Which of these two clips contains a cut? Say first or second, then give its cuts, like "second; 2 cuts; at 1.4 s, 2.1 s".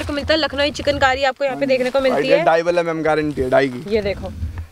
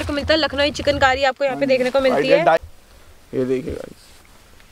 second; 1 cut; at 2.6 s